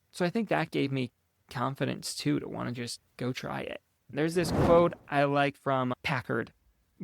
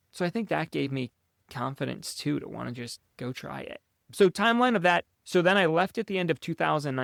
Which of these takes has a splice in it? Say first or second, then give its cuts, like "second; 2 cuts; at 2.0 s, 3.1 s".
first; 1 cut; at 4.0 s